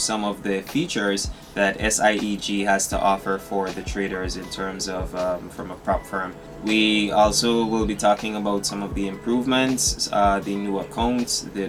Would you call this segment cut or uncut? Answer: uncut